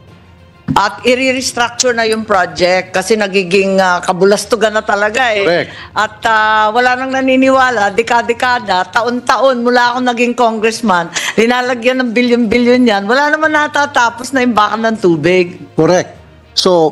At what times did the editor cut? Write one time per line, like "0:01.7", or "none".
none